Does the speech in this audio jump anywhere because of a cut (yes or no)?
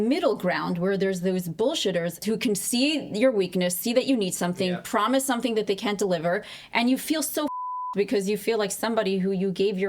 yes